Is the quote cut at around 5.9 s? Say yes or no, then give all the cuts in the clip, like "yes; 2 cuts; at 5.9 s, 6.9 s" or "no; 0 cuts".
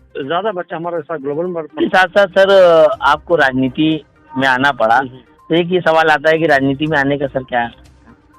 no; 1 cut; at 1.8 s